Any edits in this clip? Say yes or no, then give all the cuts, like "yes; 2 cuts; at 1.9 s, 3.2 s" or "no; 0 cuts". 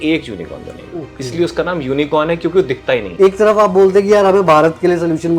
yes; 1 cut; at 3.1 s